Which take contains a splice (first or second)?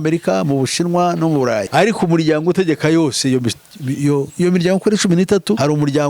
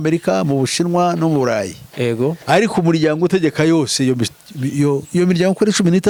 first